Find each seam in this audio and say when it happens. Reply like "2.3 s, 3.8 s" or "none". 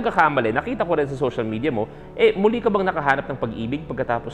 none

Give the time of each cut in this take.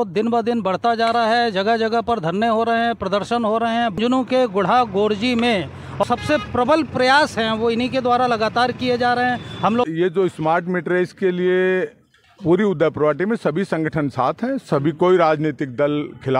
4.0 s, 6.0 s, 9.9 s

